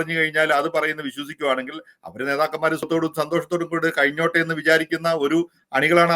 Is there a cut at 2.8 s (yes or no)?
yes